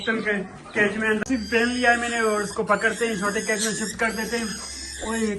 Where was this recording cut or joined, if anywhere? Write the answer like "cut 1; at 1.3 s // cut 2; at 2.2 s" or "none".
cut 1; at 1.2 s